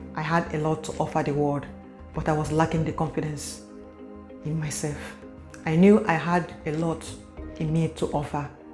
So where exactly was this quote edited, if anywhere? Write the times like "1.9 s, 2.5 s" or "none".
none

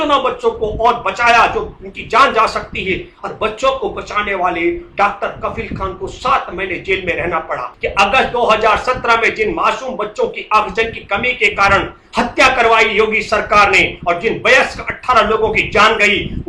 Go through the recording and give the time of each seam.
7.7 s

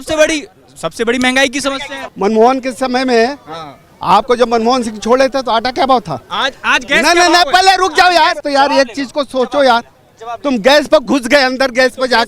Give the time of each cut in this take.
1.9 s, 6.2 s, 8.4 s

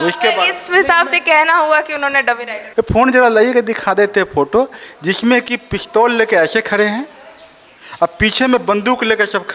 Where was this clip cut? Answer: 2.6 s

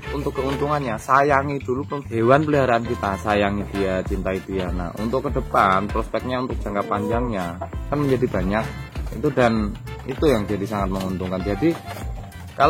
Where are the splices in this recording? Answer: 2.0 s, 7.8 s

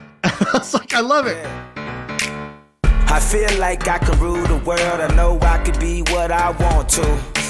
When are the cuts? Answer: 1.4 s

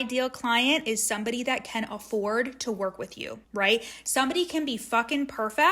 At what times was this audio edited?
none

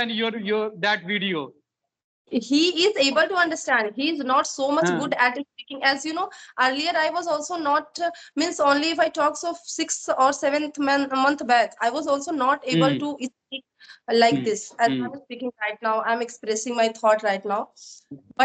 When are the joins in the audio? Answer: none

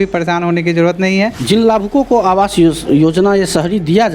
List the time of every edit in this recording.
1.4 s

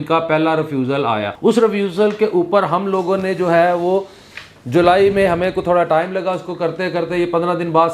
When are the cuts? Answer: 1.3 s

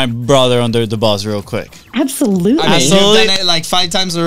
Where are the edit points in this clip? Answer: none

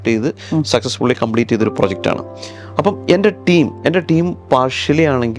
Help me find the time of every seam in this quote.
none

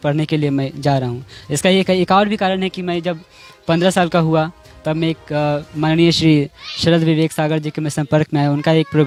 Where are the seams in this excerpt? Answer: none

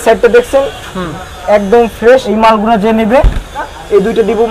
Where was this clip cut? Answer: 2.3 s, 3.7 s

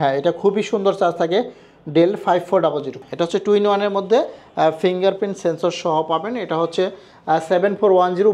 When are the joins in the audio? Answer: 2.9 s

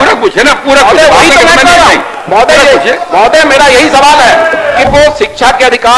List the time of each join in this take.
4.9 s

